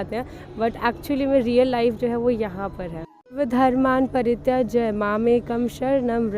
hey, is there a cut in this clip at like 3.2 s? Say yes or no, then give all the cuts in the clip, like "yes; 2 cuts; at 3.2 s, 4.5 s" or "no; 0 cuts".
yes; 1 cut; at 3.2 s